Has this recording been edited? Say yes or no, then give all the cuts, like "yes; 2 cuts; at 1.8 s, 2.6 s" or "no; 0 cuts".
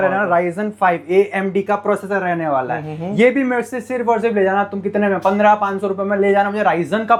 no; 0 cuts